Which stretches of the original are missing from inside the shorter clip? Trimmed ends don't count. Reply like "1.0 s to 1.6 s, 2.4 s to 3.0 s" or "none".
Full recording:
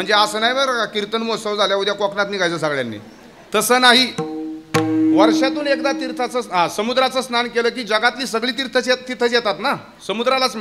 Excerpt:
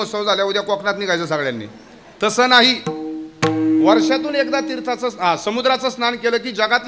none